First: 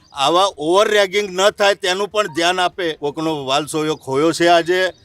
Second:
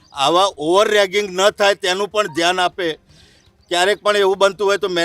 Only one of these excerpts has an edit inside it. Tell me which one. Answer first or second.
first